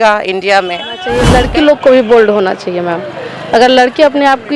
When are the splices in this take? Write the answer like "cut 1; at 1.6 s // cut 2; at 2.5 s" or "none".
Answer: cut 1; at 1.1 s